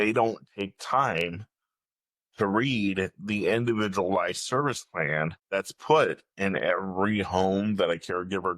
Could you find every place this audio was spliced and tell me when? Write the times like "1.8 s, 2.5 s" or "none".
5.4 s

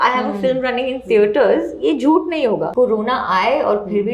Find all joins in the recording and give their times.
2.7 s

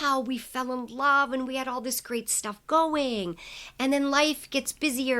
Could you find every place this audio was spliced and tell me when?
none

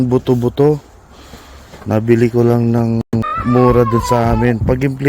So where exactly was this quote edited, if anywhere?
3.0 s

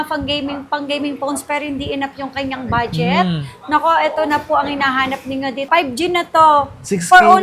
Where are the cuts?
5.7 s

